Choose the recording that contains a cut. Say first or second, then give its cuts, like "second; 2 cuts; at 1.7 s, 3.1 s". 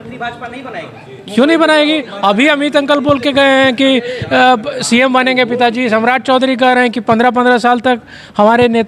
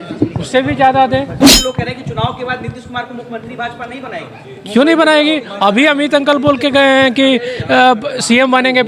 second; 1 cut; at 1.4 s